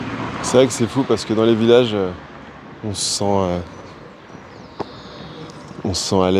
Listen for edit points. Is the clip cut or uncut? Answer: uncut